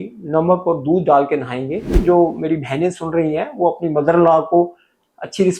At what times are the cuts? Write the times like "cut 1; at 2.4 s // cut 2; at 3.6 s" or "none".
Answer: cut 1; at 2.0 s

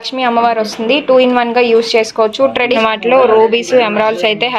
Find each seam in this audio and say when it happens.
cut 1; at 2.7 s

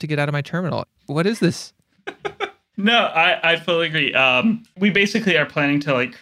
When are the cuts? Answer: cut 1; at 1.0 s // cut 2; at 2.6 s // cut 3; at 4.7 s

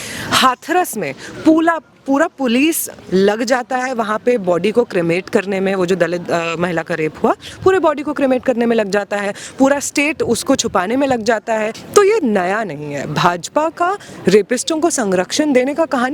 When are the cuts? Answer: cut 1; at 11.8 s

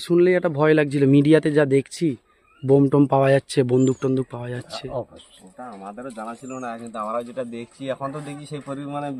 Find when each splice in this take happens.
none

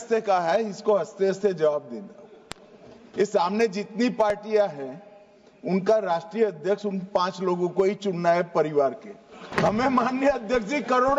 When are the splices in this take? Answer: cut 1; at 9.4 s

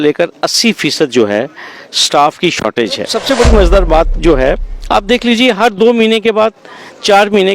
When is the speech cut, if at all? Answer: cut 1; at 3.1 s

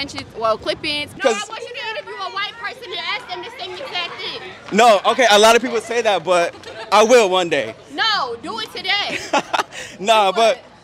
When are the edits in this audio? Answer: cut 1; at 1.2 s

